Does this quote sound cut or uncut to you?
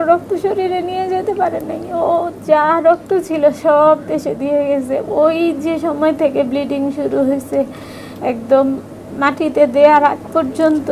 uncut